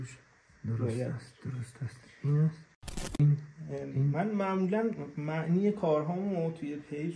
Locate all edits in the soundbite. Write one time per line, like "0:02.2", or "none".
0:03.0